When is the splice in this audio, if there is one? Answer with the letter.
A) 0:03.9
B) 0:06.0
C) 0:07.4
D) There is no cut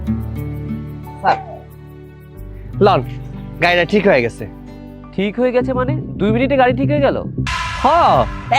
C